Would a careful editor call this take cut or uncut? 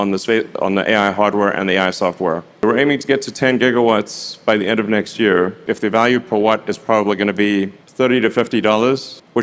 cut